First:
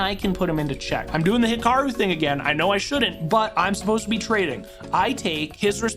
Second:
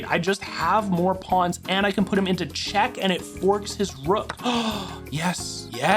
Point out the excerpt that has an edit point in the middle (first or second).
first